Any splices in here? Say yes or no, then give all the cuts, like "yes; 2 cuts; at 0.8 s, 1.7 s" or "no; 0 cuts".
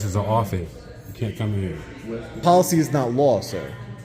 yes; 1 cut; at 2.4 s